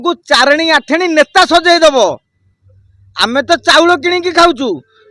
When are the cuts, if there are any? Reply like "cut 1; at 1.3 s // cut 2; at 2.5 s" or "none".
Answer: none